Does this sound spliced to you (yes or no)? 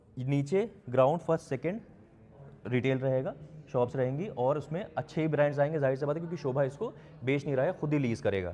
no